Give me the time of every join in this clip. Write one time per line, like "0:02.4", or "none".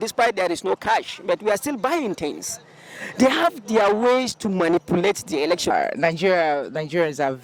0:05.7

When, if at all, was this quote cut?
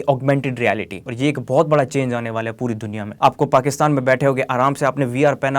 0:01.0
0:03.0

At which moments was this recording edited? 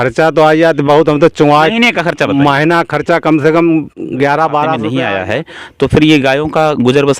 0:04.9

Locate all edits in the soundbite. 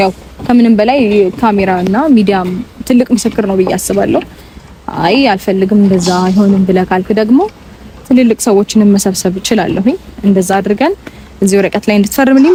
none

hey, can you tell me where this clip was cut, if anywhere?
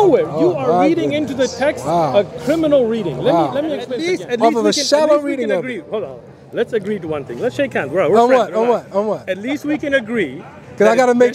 0:03.9

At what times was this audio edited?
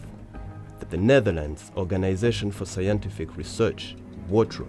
0:03.3

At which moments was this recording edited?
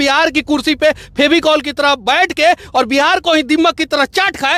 none

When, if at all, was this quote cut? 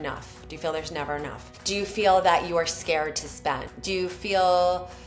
0:01.5
0:03.7

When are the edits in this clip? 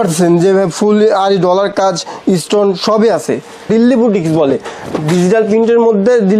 0:03.5

